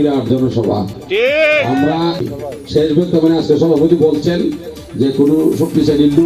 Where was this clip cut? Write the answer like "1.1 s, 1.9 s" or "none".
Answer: 2.3 s